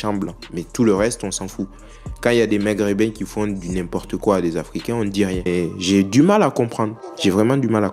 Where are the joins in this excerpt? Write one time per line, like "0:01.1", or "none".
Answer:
0:05.5